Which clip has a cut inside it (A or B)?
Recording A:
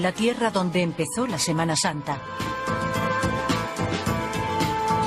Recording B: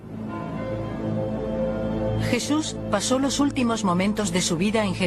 A